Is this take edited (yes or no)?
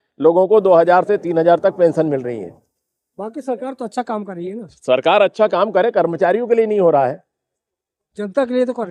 no